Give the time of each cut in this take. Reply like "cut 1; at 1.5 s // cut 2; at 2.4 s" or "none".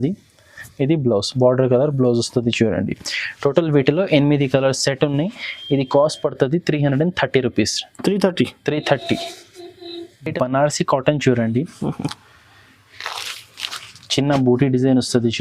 none